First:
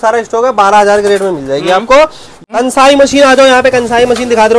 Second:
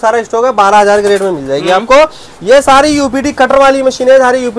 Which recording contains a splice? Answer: first; 1 cut; at 2.3 s

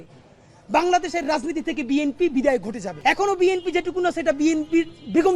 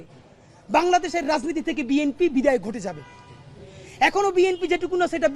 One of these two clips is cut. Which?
first; 1 cut; at 2.9 s

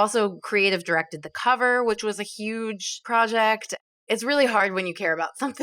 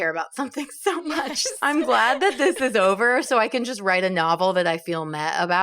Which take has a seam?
first; 1 cut; at 3.8 s

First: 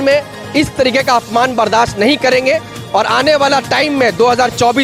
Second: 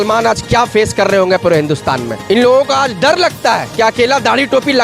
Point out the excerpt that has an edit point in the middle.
second; 2 cuts; at 2.1 s, 3.7 s

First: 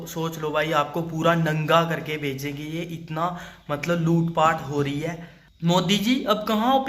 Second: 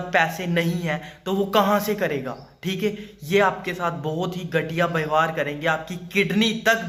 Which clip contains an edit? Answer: first; 1 cut; at 5.4 s

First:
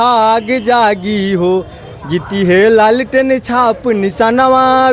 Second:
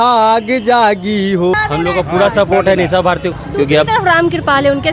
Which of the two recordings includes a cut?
second; 2 cuts; at 1.5 s, 3.3 s

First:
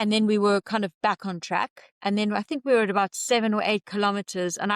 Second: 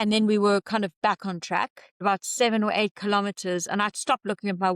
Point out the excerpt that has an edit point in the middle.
second; 1 cut; at 2.0 s

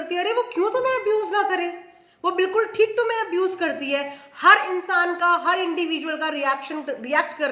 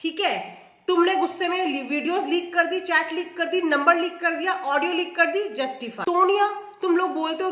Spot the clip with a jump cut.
second; 1 cut; at 5.9 s

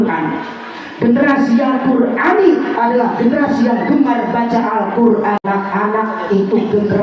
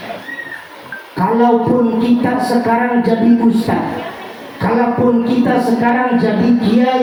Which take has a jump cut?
first; 1 cut; at 5.4 s

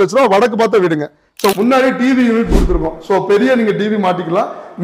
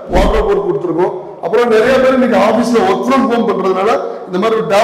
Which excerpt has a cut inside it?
first; 1 cut; at 1.5 s

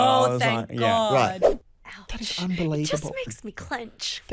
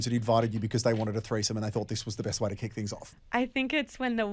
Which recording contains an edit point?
first; 1 cut; at 1.4 s

